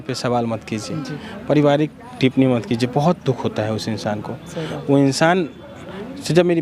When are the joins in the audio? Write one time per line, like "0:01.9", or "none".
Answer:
none